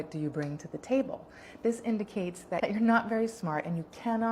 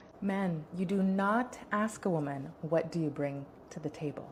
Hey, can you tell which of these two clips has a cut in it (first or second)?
first